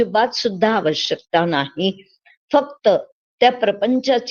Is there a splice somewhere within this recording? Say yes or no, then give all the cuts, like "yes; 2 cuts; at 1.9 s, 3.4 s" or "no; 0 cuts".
no; 0 cuts